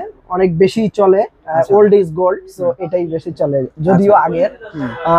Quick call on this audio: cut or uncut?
uncut